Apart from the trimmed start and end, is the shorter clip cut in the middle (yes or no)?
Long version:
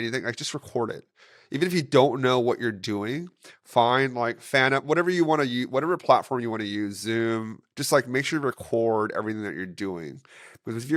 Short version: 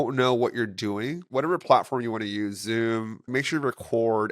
yes